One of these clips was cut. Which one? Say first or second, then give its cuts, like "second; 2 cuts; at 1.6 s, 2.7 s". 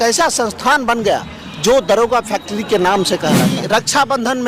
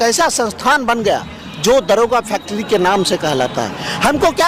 first; 1 cut; at 3.5 s